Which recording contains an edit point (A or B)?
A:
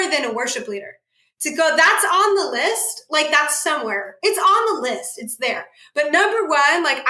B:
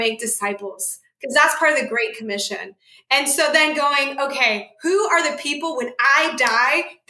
A